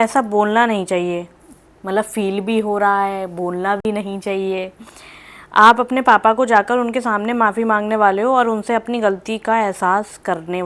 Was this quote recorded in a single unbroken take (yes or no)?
yes